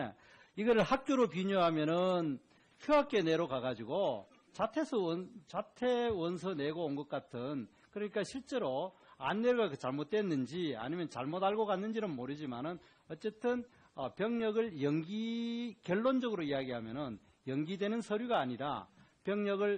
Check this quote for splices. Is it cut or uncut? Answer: cut